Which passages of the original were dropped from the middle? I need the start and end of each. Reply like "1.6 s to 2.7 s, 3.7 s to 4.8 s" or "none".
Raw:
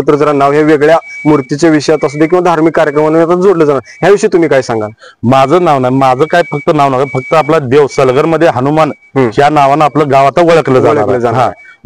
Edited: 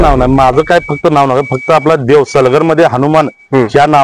none